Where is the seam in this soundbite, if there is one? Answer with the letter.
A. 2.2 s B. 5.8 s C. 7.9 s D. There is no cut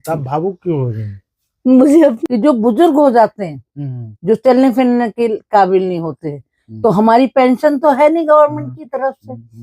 A